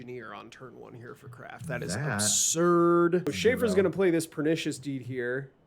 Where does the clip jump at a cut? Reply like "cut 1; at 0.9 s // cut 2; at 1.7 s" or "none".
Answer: cut 1; at 3.3 s